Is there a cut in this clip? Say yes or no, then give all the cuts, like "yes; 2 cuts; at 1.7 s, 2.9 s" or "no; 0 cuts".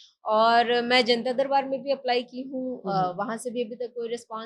no; 0 cuts